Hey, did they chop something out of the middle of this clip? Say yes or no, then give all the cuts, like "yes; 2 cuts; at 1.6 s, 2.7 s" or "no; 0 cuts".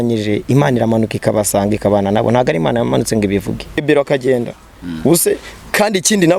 yes; 1 cut; at 3.8 s